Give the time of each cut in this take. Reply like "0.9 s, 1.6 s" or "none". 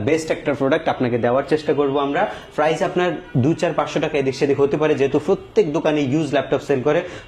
none